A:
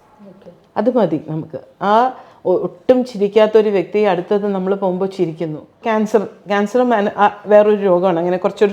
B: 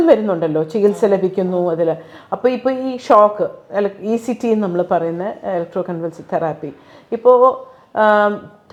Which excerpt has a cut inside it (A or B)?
A